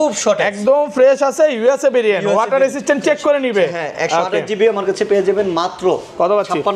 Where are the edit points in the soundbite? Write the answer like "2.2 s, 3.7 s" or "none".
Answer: none